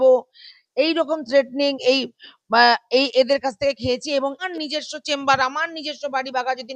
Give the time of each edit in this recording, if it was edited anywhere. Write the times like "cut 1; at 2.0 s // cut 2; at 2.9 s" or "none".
cut 1; at 4.5 s